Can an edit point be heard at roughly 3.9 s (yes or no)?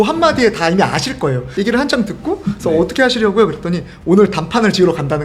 no